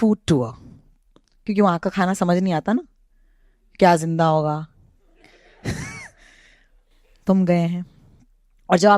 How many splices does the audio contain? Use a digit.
0